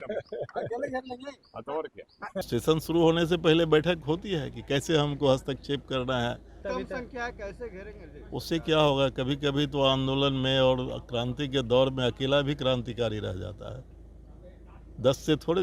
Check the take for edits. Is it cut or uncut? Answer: cut